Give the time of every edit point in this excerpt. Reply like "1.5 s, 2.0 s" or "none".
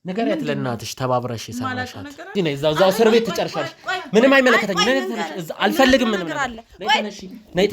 2.3 s